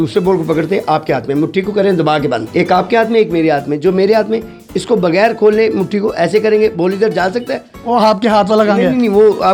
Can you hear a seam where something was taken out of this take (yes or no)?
no